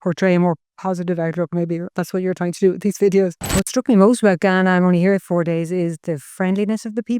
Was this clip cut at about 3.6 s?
yes; 1 cut; at 3.6 s

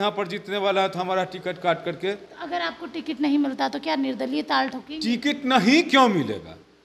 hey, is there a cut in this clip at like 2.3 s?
yes; 1 cut; at 2.3 s

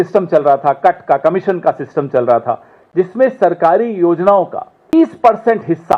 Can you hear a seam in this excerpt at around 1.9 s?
no; 1 cut; at 4.9 s

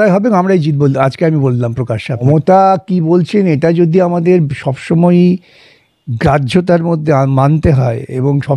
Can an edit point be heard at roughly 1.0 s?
no; 1 cut; at 2.2 s

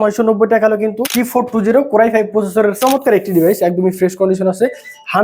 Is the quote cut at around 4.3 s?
no; 2 cuts; at 1.0 s, 2.8 s

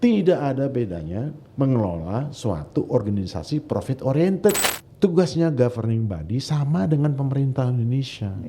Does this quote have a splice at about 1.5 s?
no; 1 cut; at 4.7 s

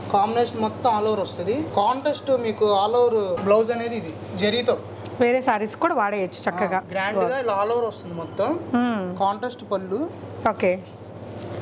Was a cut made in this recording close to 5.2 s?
no; 3 cuts; at 1.7 s, 3.4 s, 6.9 s

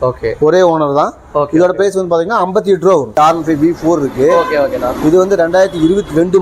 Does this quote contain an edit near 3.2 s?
yes; 1 cut; at 3.2 s

